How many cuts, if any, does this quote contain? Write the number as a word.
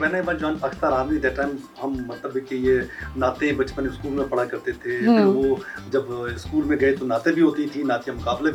zero